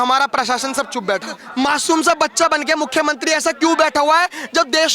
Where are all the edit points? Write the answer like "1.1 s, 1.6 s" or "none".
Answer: 1.4 s